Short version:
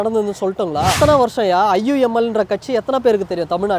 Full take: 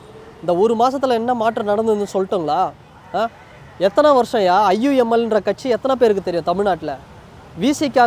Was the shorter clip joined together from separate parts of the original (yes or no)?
yes